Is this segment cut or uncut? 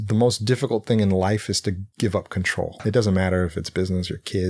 cut